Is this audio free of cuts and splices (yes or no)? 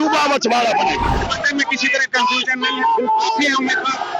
no